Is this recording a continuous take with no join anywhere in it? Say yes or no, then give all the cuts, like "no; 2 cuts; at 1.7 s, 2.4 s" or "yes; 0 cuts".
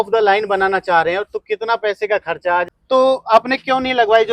no; 1 cut; at 2.7 s